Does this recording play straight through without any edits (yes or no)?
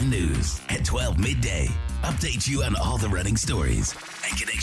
yes